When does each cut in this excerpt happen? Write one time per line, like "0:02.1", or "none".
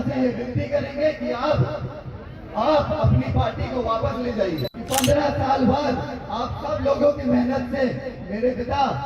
0:04.7